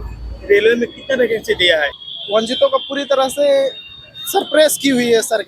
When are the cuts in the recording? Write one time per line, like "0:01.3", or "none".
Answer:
0:02.0